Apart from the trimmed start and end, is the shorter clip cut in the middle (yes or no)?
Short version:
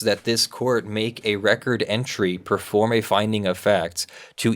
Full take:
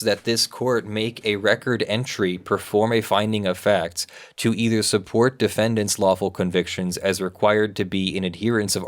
no